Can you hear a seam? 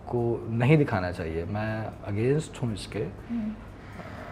no; 0 cuts

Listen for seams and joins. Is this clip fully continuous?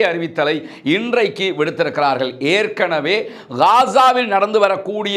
yes; 0 cuts

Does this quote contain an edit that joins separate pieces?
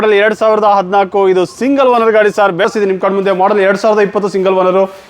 yes; 1 cut; at 2.7 s

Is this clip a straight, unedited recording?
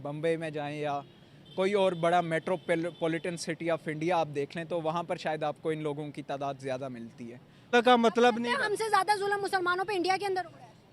no; 1 cut; at 7.7 s

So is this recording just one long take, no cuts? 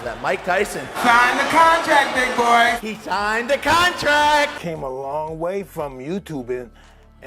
no; 1 cut; at 4.6 s

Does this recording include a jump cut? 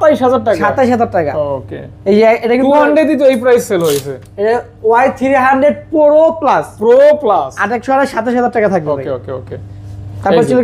no; 0 cuts

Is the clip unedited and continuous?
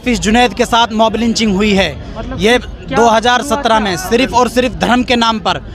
yes; 0 cuts

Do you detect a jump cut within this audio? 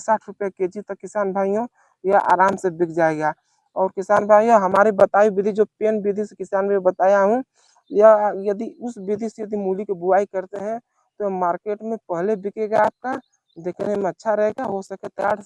no; 0 cuts

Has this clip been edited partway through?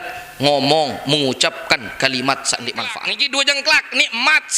yes; 1 cut; at 2.9 s

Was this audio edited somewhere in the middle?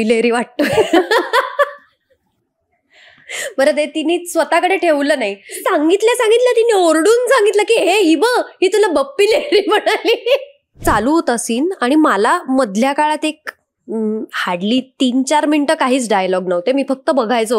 yes; 2 cuts; at 5.6 s, 10.8 s

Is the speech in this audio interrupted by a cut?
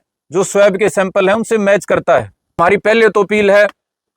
yes; 1 cut; at 2.5 s

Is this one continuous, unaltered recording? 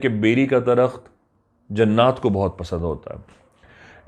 yes; 0 cuts

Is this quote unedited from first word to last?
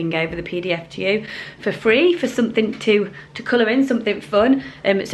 yes; 0 cuts

